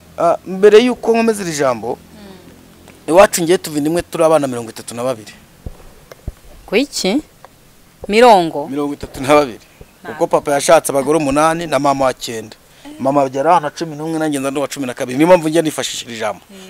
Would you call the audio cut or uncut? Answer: uncut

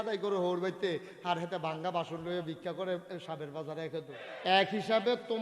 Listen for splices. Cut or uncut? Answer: cut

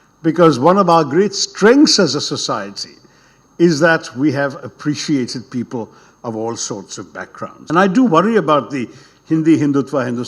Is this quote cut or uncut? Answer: cut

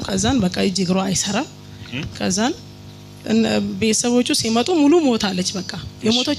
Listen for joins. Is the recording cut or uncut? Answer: uncut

